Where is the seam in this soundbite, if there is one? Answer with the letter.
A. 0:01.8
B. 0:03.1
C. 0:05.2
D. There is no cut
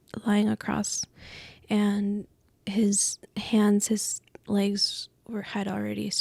D